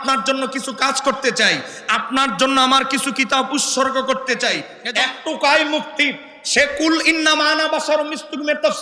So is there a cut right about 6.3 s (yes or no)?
no